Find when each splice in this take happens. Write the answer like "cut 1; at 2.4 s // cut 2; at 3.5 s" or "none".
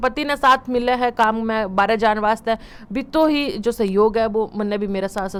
none